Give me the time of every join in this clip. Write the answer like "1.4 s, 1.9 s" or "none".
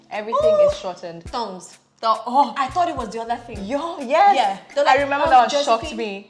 1.1 s